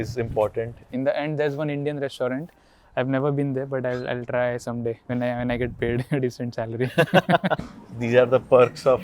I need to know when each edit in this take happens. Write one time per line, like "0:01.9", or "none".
0:00.9
0:05.0
0:07.6